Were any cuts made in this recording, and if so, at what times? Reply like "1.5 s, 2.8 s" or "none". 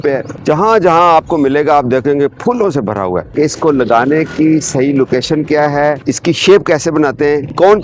3.3 s, 6.0 s